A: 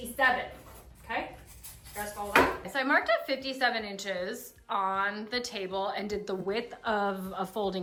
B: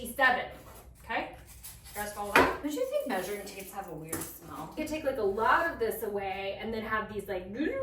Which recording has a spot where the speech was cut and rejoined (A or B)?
B